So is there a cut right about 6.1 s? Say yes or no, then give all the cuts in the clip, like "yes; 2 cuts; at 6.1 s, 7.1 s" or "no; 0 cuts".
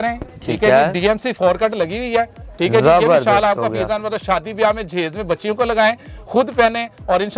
no; 0 cuts